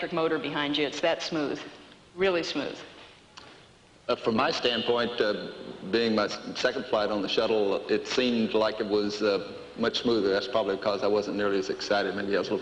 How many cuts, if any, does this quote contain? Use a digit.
1